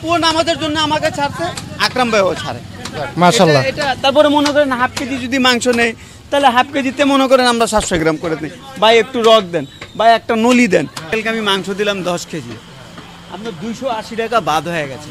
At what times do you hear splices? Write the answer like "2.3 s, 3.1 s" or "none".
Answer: 11.1 s